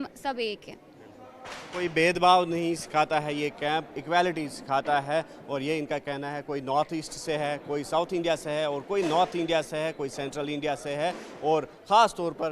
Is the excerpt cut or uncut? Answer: uncut